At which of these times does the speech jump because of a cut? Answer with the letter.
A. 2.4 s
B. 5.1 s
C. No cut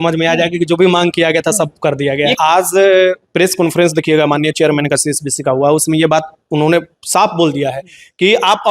A